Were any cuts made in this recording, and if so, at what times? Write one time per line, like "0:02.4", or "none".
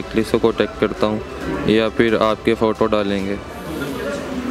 none